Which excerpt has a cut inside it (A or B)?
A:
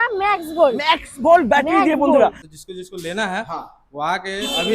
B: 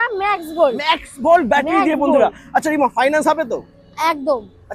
A